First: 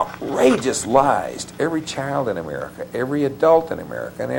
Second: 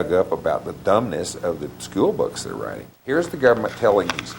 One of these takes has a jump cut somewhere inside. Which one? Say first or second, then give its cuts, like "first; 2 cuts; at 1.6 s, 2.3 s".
second; 1 cut; at 2.9 s